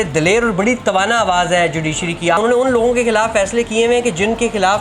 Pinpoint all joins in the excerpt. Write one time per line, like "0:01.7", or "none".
0:02.4